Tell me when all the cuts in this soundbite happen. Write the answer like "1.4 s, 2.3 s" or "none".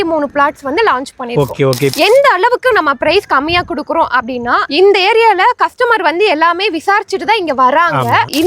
1.9 s

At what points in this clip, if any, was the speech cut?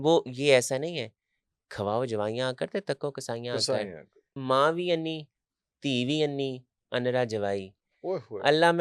4.4 s

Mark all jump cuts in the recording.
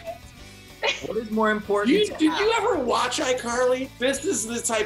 3.9 s

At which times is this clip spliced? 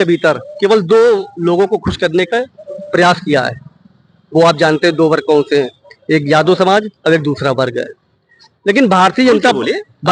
none

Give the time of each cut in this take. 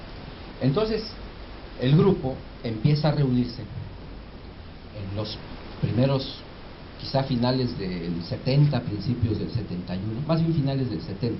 6.0 s

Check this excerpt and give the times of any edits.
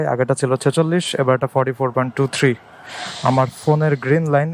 none

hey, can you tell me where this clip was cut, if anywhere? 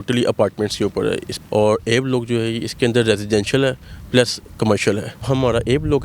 1.3 s, 5.2 s

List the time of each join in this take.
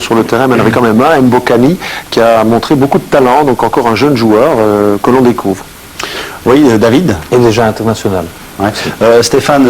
3.8 s

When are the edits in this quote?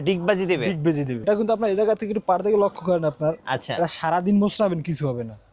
1.2 s

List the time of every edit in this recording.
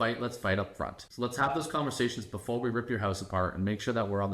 1.0 s

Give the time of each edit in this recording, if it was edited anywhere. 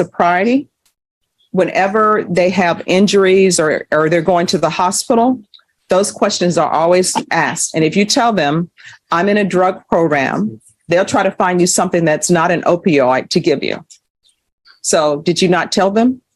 none

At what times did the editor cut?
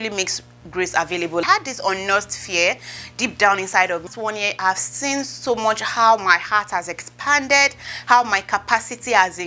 1.4 s, 4.1 s

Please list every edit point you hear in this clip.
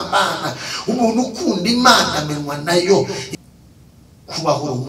3.2 s

